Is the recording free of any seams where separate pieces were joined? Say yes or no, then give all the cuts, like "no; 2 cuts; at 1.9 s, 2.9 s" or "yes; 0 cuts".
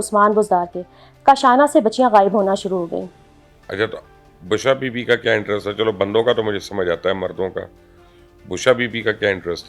yes; 0 cuts